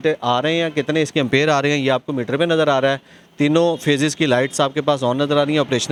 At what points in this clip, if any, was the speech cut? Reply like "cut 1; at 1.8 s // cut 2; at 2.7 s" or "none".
none